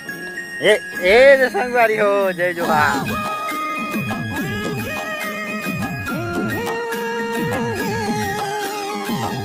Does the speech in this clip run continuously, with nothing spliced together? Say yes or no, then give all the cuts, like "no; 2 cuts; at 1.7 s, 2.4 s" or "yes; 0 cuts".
yes; 0 cuts